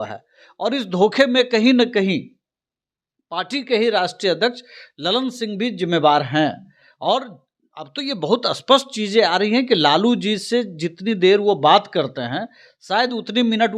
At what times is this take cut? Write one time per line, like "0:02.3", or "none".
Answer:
none